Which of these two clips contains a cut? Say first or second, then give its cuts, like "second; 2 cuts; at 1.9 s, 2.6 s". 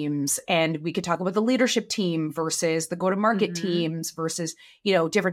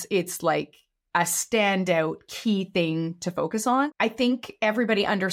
second; 1 cut; at 3.9 s